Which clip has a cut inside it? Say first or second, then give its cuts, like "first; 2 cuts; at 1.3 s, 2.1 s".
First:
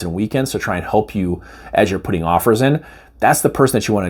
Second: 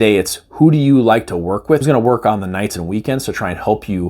second; 1 cut; at 1.8 s